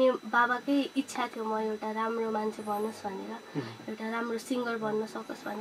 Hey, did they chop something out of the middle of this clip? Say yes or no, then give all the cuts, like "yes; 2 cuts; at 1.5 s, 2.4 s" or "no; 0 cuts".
no; 0 cuts